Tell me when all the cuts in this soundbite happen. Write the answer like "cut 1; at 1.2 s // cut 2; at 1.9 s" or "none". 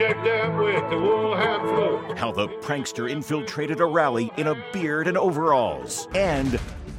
cut 1; at 5.9 s